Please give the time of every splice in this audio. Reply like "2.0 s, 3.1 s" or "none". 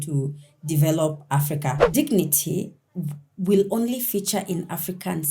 1.8 s

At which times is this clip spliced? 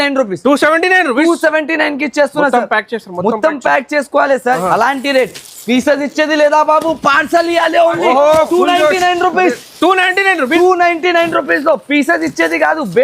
4.6 s

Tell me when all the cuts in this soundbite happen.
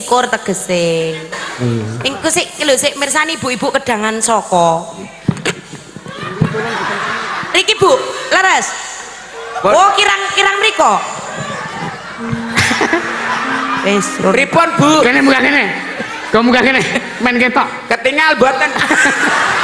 2.0 s

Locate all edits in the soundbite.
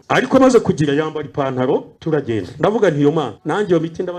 1.9 s, 3.4 s

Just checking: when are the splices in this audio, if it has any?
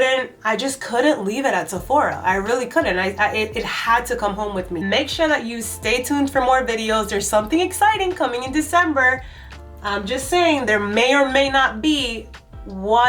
4.7 s

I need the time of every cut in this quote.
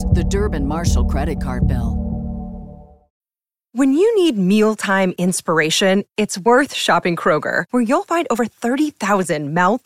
3.1 s

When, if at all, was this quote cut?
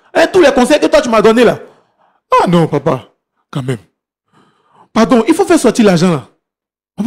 none

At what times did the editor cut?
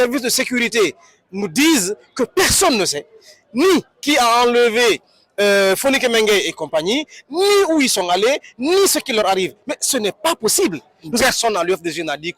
11.2 s

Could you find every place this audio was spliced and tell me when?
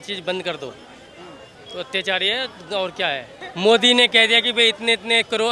3.4 s

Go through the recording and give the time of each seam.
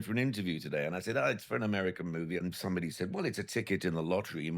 2.4 s

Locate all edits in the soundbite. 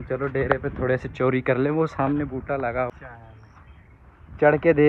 2.9 s

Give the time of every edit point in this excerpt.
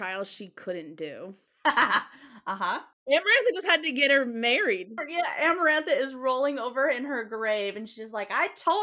1.4 s, 2.9 s

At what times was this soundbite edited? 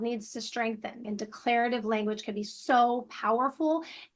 1.0 s

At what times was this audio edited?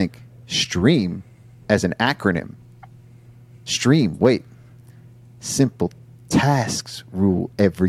none

